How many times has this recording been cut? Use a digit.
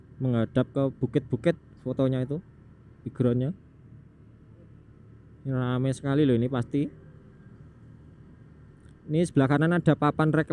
0